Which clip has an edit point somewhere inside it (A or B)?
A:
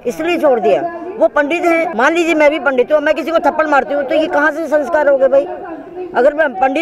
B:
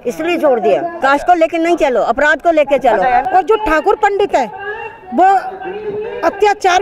B